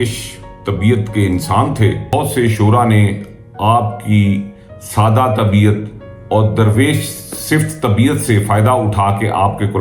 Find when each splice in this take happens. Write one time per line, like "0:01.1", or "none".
0:02.1